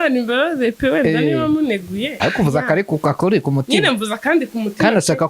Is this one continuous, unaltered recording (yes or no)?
no